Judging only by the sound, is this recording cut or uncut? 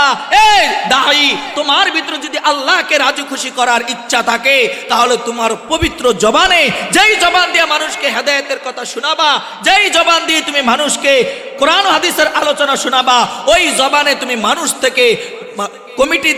uncut